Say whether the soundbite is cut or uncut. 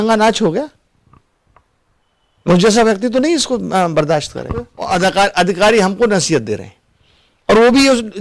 cut